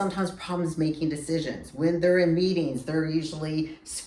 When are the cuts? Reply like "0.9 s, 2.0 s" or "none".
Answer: none